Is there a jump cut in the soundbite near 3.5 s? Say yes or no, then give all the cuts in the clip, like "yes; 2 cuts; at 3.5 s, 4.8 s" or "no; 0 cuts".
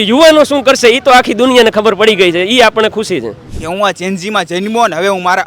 yes; 1 cut; at 3.5 s